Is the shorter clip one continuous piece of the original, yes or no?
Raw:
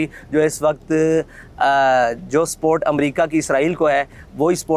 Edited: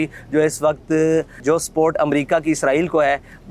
no